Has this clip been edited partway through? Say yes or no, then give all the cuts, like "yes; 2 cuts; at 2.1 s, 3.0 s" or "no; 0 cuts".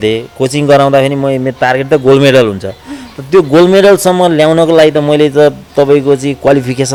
no; 0 cuts